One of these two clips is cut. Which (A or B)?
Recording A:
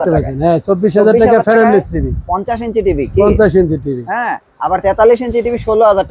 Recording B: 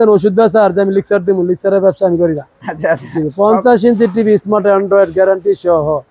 B